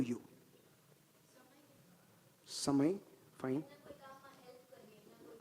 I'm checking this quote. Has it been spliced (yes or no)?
no